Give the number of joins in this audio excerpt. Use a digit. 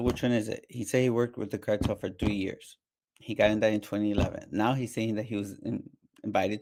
0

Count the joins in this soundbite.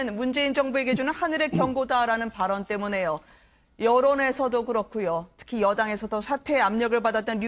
0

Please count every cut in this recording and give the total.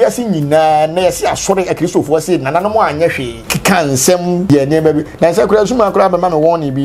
2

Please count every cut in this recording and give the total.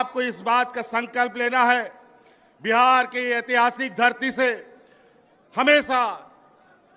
0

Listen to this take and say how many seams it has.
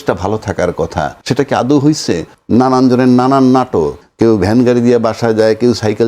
3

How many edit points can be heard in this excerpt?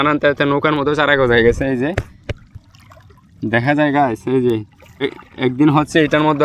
1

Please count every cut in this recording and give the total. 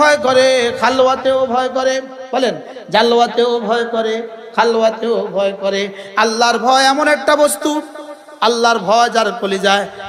0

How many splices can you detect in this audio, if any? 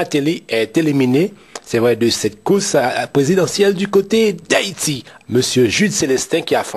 1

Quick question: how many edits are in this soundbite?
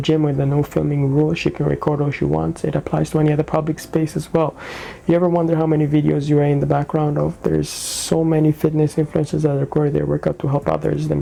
0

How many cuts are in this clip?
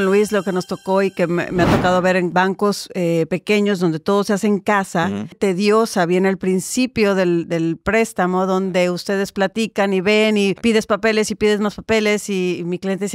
3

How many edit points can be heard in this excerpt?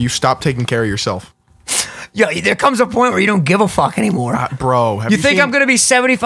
0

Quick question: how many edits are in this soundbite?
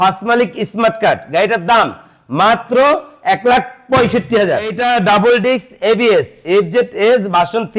1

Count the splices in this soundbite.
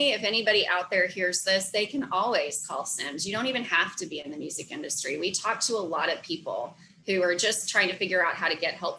0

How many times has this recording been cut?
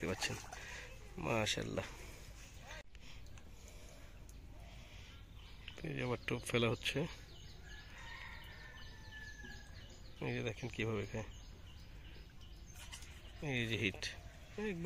1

